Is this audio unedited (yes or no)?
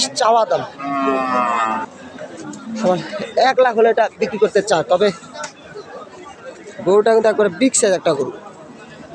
no